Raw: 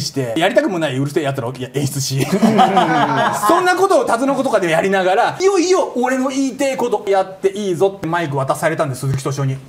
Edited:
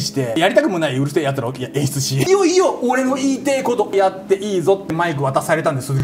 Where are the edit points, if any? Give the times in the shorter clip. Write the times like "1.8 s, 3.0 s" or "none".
2.2 s